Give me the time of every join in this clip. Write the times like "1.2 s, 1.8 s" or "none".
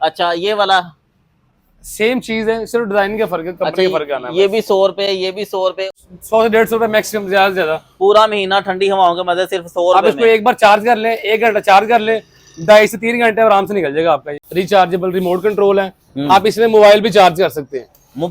5.8 s, 14.4 s